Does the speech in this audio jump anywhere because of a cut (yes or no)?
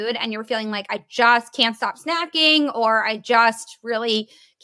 no